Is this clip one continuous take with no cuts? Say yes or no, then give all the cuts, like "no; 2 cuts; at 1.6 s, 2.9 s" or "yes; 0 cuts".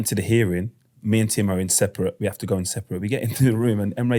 yes; 0 cuts